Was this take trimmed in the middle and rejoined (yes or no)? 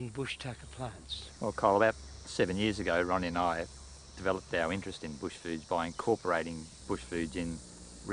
yes